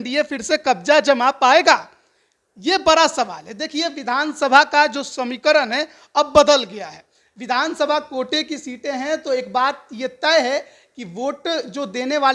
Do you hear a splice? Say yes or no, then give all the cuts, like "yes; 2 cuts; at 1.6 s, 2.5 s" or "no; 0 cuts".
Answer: no; 0 cuts